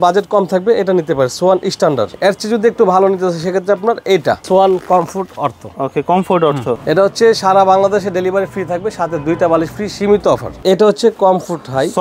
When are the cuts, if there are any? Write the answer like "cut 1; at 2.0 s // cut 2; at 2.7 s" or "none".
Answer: cut 1; at 2.2 s // cut 2; at 4.4 s // cut 3; at 6.8 s // cut 4; at 10.6 s